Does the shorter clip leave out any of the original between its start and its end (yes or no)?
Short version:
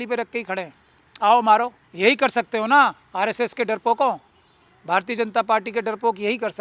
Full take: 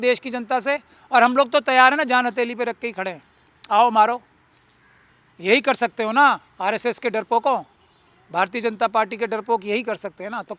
yes